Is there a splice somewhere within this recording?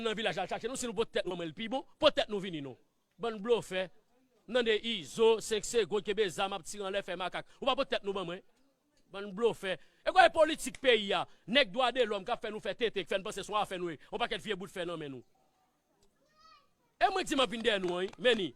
yes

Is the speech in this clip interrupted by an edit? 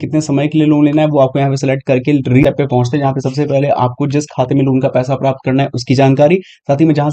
yes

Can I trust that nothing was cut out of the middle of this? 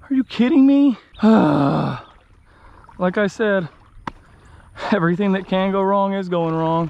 no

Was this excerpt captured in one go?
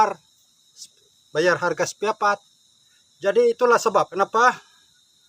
no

